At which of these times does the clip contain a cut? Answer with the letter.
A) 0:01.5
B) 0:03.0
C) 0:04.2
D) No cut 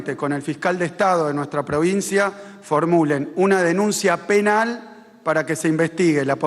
D